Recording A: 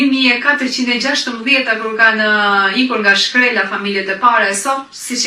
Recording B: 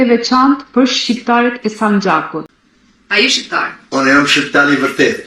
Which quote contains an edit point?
B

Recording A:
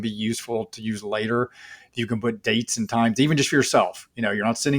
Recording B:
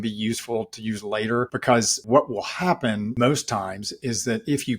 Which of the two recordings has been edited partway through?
B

